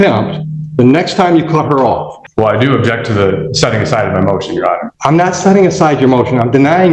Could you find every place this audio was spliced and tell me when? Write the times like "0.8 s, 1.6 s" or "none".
2.2 s, 4.9 s